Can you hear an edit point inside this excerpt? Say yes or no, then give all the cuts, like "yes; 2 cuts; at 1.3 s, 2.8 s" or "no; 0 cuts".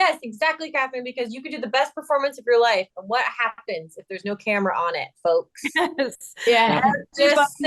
no; 0 cuts